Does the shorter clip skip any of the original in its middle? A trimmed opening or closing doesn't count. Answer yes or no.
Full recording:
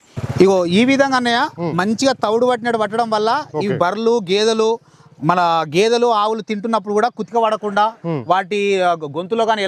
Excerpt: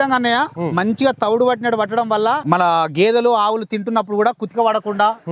yes